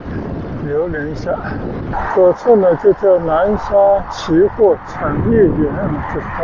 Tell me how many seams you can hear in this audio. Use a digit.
1